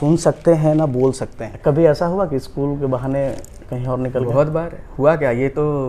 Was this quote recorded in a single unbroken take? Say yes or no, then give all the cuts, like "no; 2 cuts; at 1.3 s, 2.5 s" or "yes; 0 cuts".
no; 1 cut; at 1.4 s